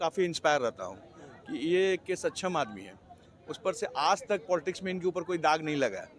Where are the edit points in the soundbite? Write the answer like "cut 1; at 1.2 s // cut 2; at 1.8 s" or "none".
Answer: none